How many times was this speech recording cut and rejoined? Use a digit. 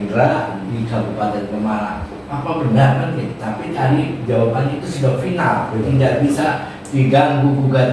0